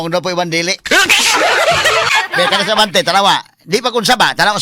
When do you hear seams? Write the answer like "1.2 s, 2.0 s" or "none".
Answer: 2.1 s